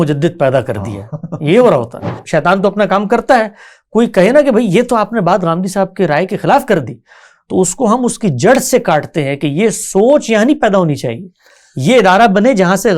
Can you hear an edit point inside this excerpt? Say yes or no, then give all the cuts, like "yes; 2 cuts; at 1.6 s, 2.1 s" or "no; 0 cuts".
yes; 1 cut; at 2.2 s